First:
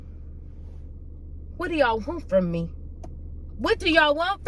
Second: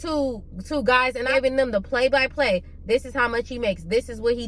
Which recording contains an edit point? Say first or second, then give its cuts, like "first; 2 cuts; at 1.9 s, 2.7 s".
second; 1 cut; at 1.3 s